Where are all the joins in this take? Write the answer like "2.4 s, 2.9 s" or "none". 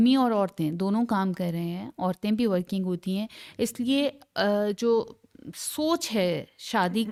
none